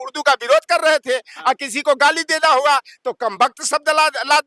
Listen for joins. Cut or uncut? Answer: uncut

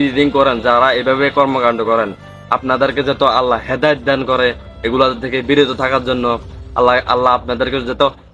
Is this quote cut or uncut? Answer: uncut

